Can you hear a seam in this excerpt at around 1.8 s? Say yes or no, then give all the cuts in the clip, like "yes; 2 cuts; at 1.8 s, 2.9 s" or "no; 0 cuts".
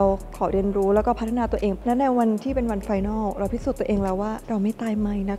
yes; 1 cut; at 1.8 s